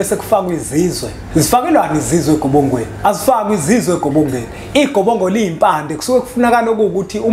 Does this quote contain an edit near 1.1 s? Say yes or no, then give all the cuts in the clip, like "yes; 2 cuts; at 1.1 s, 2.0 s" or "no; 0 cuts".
yes; 2 cuts; at 1.1 s, 2.9 s